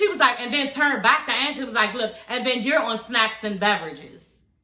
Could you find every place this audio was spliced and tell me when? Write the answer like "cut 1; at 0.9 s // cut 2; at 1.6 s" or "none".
none